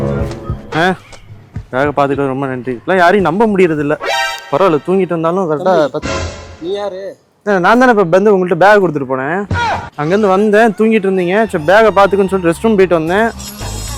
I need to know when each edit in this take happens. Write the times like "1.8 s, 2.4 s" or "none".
none